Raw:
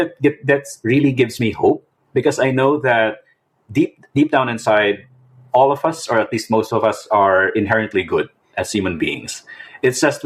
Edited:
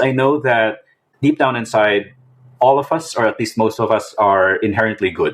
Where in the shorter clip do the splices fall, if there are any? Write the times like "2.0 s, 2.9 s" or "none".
1.1 s